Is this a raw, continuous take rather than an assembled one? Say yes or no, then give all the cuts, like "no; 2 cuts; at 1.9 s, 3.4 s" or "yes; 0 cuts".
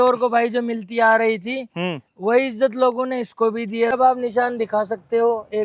no; 1 cut; at 3.9 s